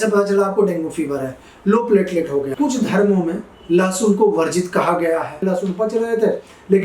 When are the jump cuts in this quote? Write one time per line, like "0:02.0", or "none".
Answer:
0:02.5
0:05.4